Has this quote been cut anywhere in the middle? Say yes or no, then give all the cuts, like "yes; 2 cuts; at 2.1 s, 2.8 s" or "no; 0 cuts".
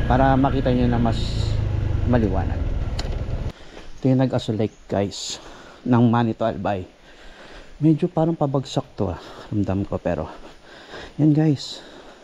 yes; 1 cut; at 3.5 s